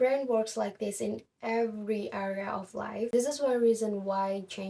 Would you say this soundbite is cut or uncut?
uncut